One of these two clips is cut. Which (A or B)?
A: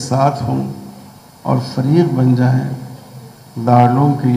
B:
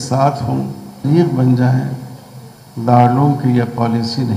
B